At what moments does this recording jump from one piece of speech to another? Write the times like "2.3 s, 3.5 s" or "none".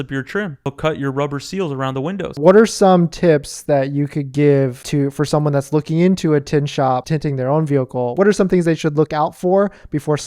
2.2 s, 7.0 s, 8.1 s

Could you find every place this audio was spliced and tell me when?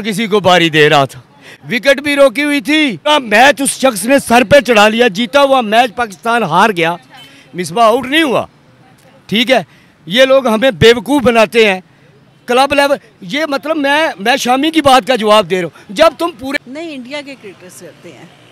3.1 s, 16.4 s

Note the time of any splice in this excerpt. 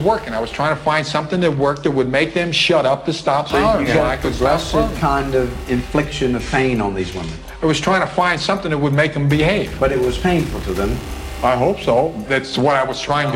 12.3 s

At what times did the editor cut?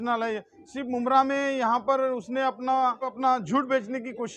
3.1 s

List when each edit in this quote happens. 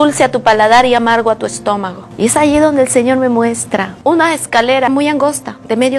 2.0 s, 4.9 s

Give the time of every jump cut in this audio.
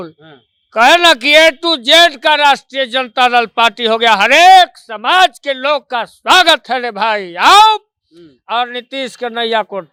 none

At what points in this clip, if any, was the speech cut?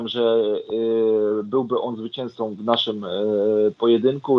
none

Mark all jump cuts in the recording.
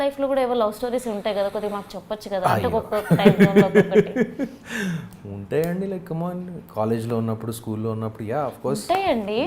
none

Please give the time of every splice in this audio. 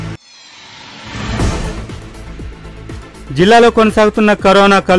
3.2 s

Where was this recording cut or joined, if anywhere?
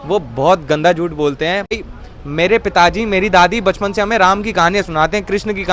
1.7 s

